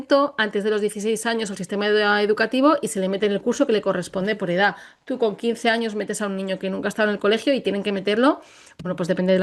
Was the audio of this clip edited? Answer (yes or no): no